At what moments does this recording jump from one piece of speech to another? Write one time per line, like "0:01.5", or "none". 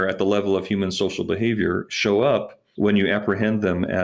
0:02.6